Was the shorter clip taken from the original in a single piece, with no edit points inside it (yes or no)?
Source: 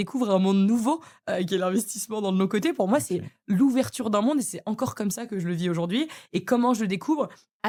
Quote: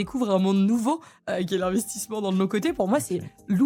yes